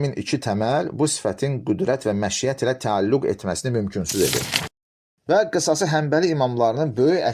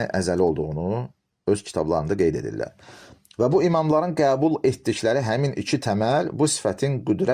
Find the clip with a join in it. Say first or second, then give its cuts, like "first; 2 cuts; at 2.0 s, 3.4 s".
first; 1 cut; at 4.8 s